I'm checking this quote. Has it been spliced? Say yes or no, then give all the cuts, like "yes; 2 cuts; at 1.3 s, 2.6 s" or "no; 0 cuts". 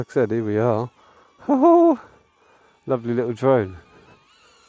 no; 0 cuts